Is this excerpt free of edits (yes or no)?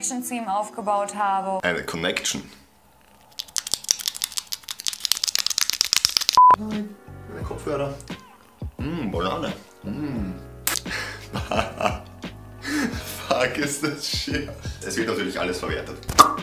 yes